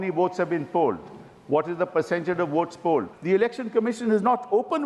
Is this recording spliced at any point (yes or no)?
yes